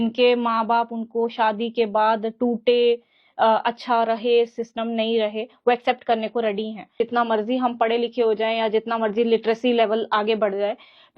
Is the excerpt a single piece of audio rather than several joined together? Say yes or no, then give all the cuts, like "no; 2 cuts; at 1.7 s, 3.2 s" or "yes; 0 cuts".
no; 1 cut; at 6.9 s